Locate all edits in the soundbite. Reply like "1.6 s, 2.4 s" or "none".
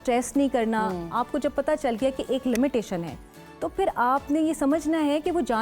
none